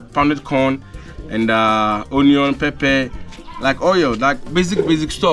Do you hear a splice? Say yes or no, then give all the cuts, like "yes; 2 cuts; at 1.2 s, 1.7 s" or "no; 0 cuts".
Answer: no; 0 cuts